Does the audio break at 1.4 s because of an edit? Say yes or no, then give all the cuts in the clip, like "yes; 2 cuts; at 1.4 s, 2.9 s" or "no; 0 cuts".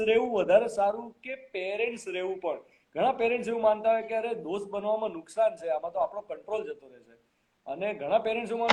no; 0 cuts